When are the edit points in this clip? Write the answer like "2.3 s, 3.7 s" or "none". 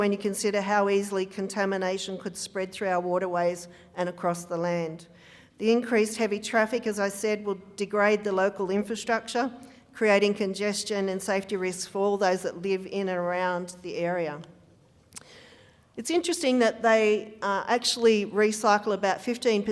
none

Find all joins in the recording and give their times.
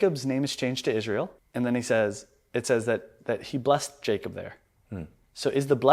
1.4 s

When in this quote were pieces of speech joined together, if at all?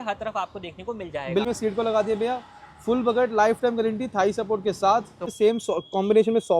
1.5 s, 5.3 s

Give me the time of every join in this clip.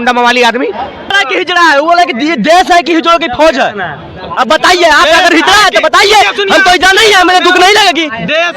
1.1 s

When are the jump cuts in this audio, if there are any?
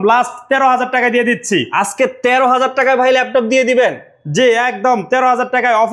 none

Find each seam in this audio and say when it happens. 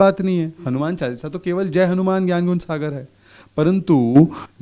none

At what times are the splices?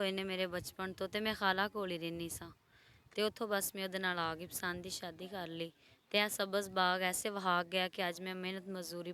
none

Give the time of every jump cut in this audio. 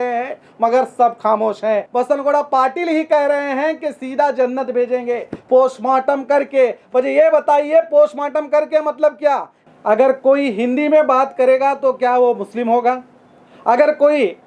1.9 s, 9.6 s

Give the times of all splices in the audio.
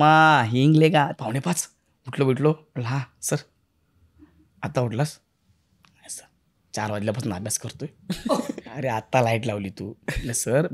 1.1 s, 8.6 s

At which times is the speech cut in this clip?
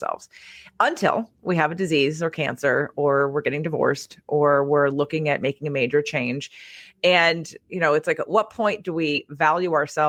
none

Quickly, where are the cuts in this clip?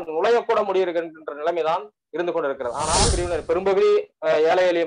3.1 s

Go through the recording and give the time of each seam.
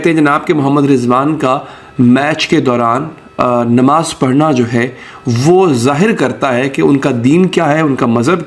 none

